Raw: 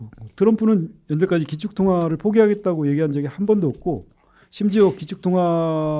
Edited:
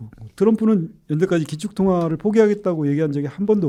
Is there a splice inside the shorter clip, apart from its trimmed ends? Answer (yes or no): no